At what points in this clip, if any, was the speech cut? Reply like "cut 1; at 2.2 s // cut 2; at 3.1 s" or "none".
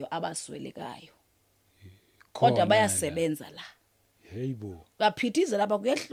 none